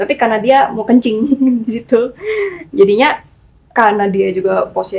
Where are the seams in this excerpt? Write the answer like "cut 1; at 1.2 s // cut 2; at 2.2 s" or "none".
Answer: none